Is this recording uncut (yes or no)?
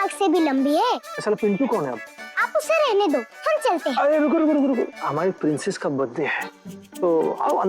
no